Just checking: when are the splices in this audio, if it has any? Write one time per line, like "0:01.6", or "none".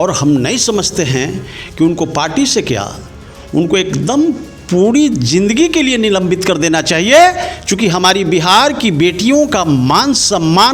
none